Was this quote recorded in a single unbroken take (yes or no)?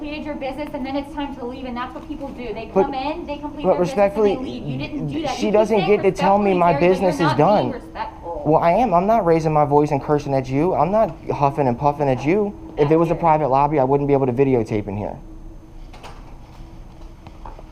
no